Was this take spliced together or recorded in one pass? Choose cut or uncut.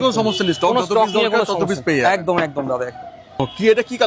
uncut